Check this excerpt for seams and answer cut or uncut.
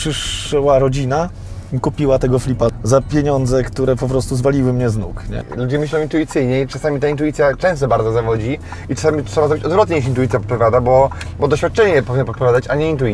cut